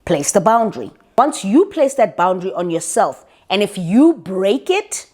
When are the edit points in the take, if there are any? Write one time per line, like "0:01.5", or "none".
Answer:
0:01.0